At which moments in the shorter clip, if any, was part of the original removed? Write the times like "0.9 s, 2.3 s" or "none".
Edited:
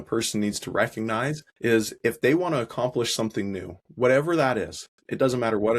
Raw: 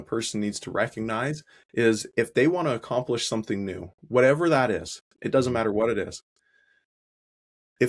1.5 s